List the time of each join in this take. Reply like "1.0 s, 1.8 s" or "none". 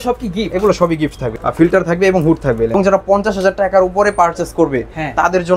1.3 s, 2.7 s